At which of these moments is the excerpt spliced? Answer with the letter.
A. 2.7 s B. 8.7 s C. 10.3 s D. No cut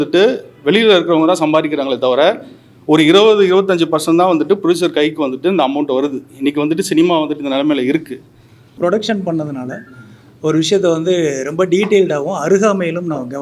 B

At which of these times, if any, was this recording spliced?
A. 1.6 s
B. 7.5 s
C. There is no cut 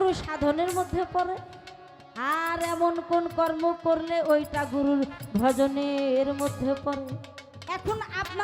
B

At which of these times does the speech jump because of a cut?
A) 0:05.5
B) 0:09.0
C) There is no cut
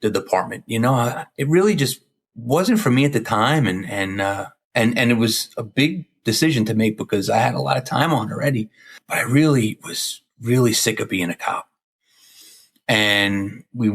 B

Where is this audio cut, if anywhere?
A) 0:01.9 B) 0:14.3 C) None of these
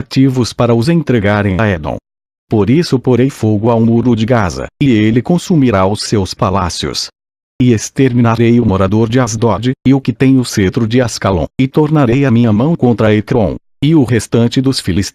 B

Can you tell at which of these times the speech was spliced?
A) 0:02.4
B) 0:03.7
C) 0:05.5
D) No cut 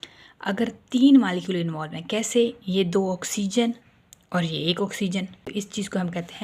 C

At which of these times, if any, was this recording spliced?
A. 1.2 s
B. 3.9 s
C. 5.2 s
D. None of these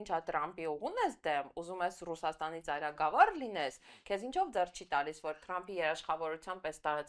D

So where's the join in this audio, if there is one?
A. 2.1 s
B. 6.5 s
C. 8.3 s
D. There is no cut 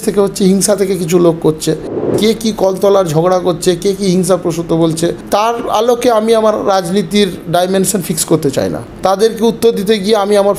A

